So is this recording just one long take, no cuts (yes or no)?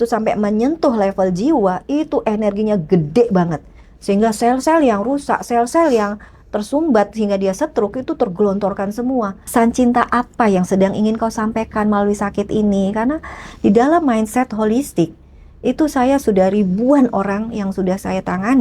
no